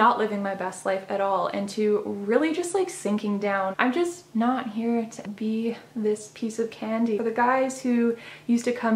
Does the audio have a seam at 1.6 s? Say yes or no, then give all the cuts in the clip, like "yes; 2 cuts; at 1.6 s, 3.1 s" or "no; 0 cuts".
no; 3 cuts; at 3.7 s, 5.2 s, 7.2 s